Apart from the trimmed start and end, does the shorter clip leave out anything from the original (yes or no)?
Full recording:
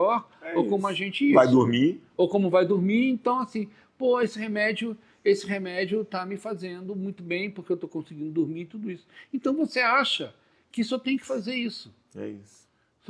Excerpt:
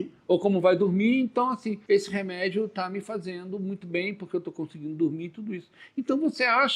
yes